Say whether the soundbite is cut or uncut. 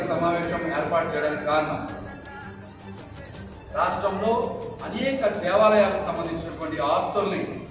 cut